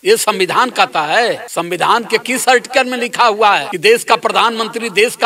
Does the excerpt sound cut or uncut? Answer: cut